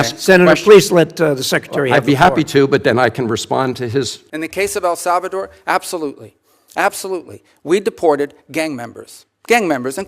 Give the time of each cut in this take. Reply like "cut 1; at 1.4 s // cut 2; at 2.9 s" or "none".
cut 1; at 4.2 s

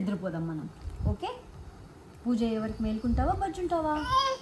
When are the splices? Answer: none

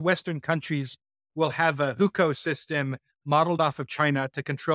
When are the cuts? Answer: none

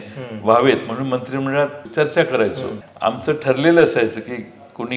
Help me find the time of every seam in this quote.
cut 1; at 1.8 s // cut 2; at 2.8 s

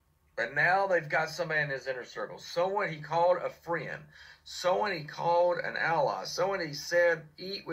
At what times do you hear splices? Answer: none

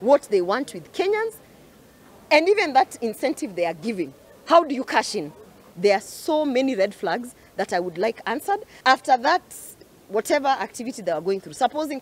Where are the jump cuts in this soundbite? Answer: cut 1; at 5.6 s // cut 2; at 8.7 s

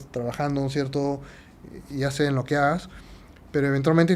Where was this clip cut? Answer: none

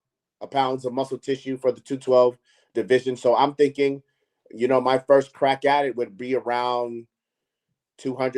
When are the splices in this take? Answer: none

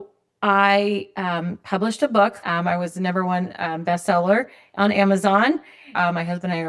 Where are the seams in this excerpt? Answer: none

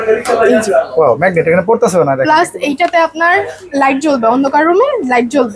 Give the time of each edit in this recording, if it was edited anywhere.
none

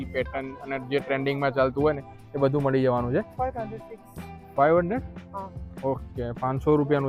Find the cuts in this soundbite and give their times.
cut 1; at 3.3 s

